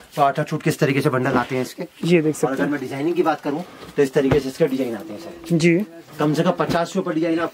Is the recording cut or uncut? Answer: uncut